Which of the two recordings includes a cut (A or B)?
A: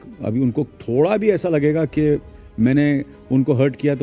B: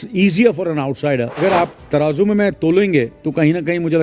B